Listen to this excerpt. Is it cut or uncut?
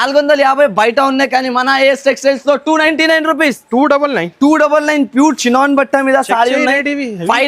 uncut